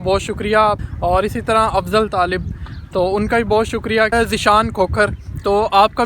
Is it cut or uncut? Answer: cut